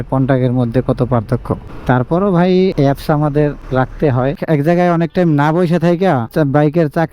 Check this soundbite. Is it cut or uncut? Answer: cut